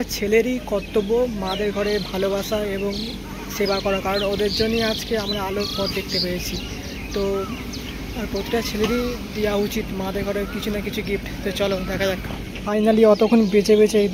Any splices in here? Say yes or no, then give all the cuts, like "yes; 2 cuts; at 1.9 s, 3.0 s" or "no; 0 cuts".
yes; 1 cut; at 12.5 s